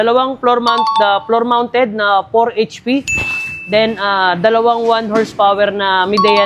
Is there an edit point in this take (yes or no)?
no